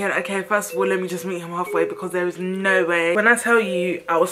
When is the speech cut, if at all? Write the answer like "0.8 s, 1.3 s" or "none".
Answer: 3.1 s